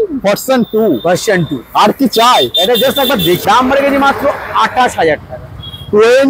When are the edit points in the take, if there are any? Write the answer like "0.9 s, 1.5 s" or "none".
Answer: 3.4 s